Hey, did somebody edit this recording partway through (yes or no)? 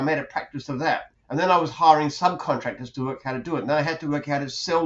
yes